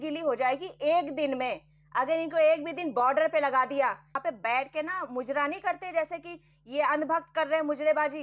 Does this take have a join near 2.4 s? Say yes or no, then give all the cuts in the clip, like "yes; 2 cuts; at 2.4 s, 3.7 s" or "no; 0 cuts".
no; 1 cut; at 4.1 s